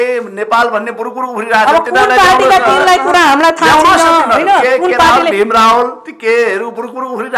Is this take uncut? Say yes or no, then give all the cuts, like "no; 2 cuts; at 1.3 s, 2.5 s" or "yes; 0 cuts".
yes; 0 cuts